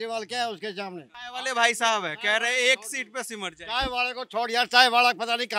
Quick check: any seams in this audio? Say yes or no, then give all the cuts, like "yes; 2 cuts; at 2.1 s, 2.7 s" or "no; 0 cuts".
no; 0 cuts